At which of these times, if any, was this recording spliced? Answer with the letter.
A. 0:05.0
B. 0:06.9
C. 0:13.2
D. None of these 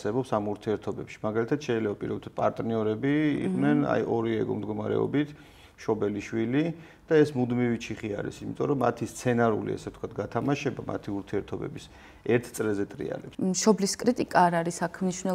C